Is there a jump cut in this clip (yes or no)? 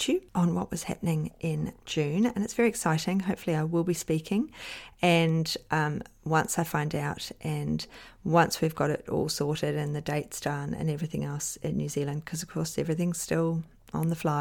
no